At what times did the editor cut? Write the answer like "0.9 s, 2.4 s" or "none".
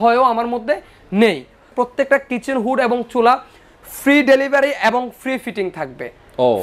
1.7 s